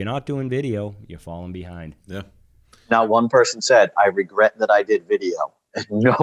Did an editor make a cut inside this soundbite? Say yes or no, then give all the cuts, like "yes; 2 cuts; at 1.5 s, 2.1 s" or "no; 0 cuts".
no; 0 cuts